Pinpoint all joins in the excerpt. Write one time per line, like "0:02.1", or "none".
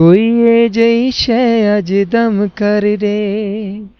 none

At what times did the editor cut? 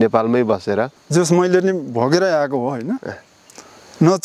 0:01.0

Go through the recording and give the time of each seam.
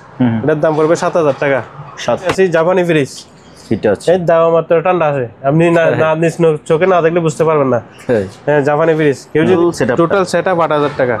0:02.3
0:09.6

